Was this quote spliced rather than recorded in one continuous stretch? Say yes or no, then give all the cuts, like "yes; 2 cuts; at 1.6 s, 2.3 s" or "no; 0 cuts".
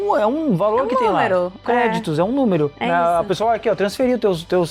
no; 0 cuts